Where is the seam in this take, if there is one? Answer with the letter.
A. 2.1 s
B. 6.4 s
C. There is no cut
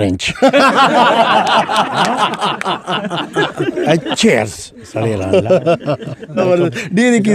B